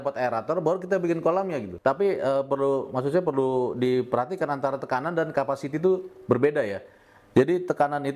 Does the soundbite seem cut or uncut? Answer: cut